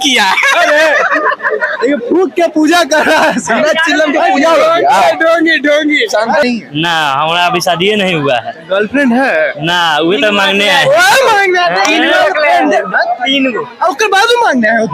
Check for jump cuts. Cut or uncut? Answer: cut